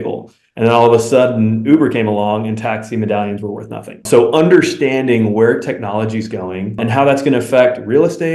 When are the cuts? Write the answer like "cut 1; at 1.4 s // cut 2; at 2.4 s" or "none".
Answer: cut 1; at 4.0 s // cut 2; at 6.8 s